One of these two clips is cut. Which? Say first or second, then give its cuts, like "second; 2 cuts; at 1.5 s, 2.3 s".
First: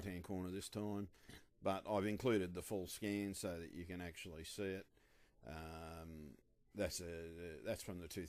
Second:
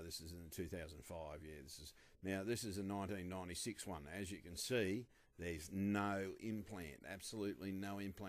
second; 1 cut; at 2.4 s